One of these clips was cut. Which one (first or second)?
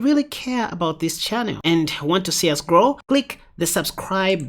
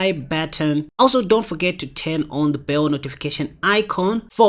first